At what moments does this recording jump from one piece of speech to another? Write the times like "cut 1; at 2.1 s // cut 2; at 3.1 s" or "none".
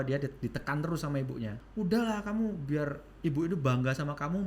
cut 1; at 1.6 s